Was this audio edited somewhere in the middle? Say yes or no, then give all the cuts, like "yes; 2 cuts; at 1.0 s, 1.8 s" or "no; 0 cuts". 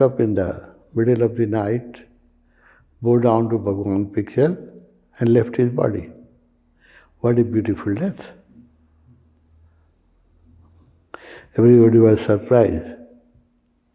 no; 0 cuts